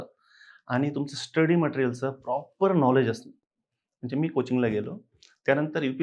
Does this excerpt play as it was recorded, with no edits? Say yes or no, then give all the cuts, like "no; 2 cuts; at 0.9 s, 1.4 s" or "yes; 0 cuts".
yes; 0 cuts